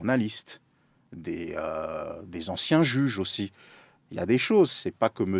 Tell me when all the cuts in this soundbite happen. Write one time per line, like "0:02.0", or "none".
none